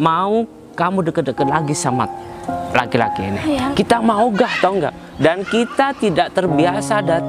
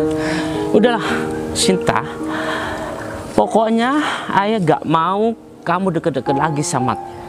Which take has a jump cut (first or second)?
first